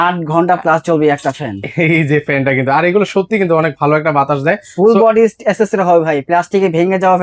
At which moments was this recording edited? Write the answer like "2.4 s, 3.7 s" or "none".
none